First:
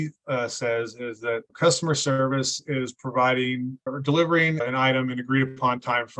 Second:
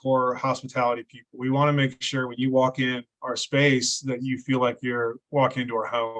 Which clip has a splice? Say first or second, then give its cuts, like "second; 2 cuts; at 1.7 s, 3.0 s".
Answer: first; 3 cuts; at 1.5 s, 3.9 s, 4.6 s